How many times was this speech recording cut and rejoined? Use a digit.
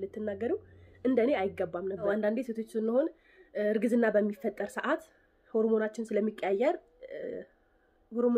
1